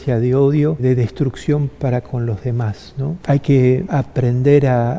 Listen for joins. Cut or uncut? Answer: cut